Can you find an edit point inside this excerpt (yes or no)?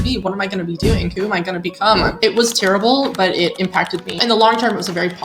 yes